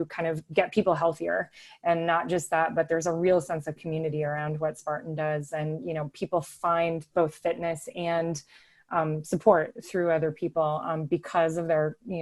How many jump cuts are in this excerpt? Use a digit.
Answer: 0